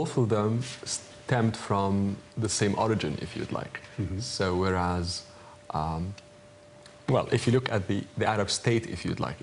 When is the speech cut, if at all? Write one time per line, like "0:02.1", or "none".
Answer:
0:06.7